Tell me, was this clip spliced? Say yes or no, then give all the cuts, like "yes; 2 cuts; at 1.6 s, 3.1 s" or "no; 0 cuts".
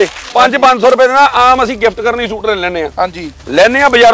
no; 0 cuts